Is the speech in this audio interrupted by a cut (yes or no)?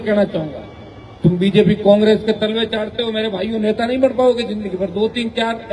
no